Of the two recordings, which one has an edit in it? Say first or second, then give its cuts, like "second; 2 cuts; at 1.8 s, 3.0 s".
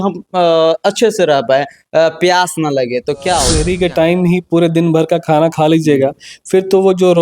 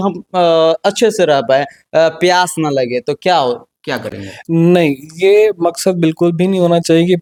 first; 1 cut; at 3.6 s